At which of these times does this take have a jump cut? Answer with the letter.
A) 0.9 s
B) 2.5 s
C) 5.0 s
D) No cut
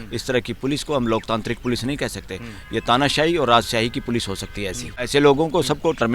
C